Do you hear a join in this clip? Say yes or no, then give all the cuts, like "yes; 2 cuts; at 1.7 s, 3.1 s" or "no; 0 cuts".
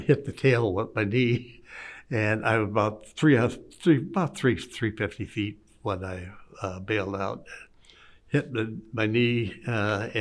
no; 0 cuts